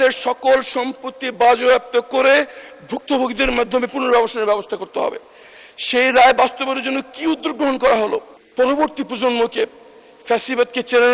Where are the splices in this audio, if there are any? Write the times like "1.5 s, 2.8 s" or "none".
8.4 s

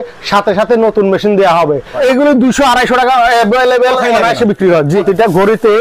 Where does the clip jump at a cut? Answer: 2.0 s, 5.0 s

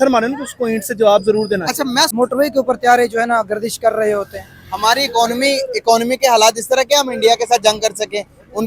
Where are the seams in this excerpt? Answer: 2.1 s

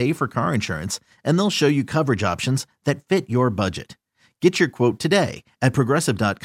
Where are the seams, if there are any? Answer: none

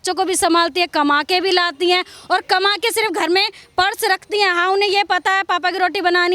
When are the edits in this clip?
none

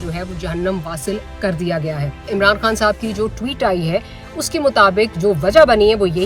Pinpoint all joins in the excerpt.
2.3 s

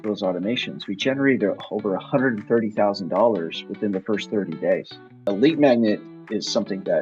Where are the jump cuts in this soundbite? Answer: 5.2 s

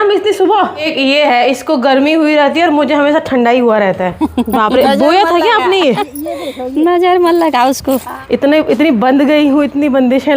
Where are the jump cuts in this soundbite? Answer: 0.9 s, 4.1 s, 8.1 s

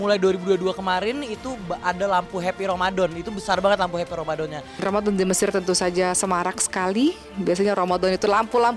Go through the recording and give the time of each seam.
4.7 s

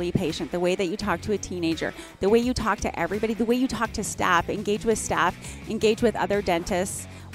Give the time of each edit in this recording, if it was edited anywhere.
none

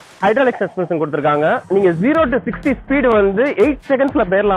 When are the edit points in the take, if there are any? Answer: 1.6 s

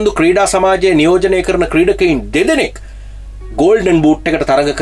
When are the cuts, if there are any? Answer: none

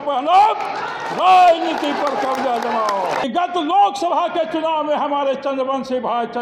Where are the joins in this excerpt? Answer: 3.2 s

